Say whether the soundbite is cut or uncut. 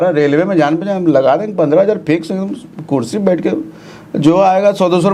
uncut